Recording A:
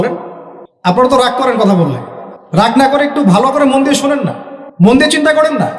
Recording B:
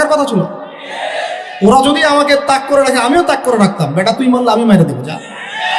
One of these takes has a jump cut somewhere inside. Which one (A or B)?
A